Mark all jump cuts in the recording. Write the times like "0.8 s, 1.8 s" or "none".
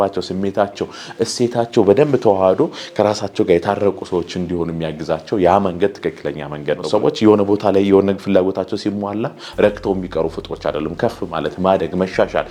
6.8 s